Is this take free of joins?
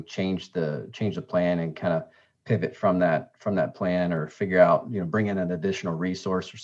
yes; 0 cuts

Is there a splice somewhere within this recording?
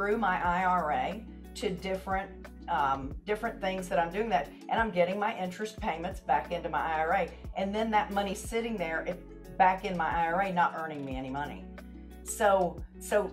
no; 0 cuts

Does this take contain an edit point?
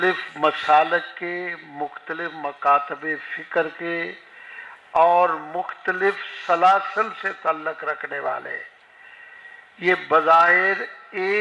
no; 0 cuts

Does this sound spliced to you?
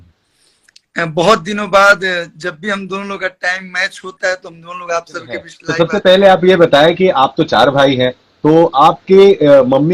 yes; 1 cut; at 5.6 s

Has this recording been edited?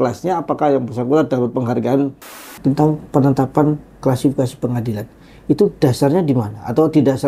yes; 1 cut; at 2.4 s

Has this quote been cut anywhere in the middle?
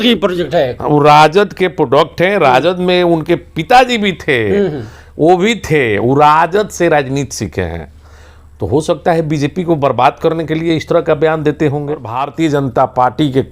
yes; 1 cut; at 12.2 s

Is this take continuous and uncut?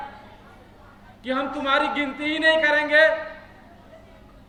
yes; 0 cuts

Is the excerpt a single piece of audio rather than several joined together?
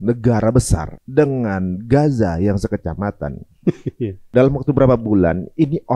no; 2 cuts; at 0.9 s, 4.3 s

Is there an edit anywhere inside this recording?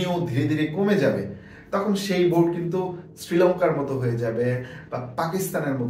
no; 0 cuts

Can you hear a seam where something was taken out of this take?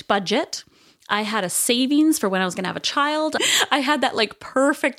yes; 1 cut; at 3.4 s

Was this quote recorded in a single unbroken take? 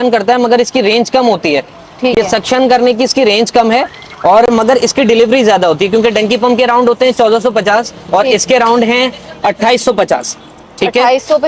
yes; 0 cuts

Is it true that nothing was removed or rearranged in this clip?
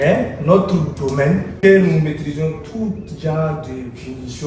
no; 1 cut; at 1.6 s

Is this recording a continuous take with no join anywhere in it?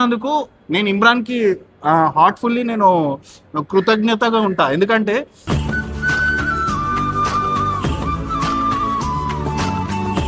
yes; 0 cuts

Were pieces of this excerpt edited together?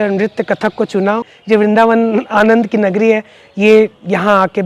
yes; 1 cut; at 1.2 s

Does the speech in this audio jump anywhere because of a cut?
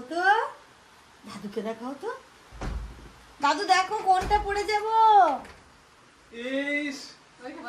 no; 0 cuts

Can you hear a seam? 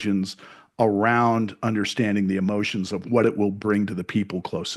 no; 0 cuts

